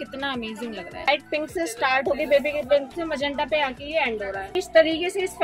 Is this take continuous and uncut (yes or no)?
no